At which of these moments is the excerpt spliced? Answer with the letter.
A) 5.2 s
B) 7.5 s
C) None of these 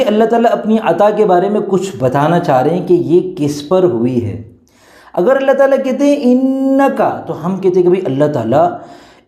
B